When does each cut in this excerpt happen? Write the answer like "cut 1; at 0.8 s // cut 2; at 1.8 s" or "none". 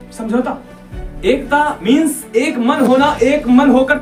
none